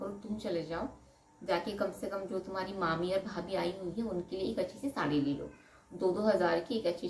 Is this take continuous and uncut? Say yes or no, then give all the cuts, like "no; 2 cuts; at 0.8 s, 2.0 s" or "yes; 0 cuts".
yes; 0 cuts